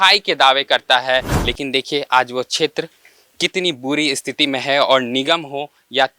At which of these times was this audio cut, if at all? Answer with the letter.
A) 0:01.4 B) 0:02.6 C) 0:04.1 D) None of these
A